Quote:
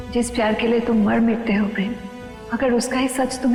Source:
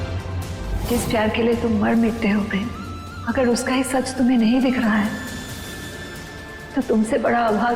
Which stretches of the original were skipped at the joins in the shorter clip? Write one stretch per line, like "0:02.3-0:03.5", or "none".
none